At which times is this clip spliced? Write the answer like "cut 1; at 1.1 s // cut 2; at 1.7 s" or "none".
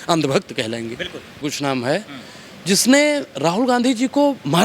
cut 1; at 1.4 s